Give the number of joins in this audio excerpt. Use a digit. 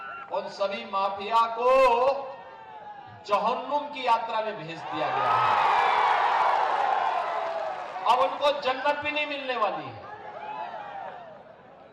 0